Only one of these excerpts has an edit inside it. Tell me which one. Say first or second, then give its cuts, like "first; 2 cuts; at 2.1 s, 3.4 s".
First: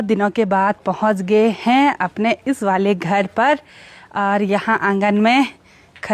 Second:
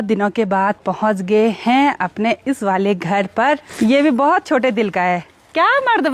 second; 1 cut; at 3.7 s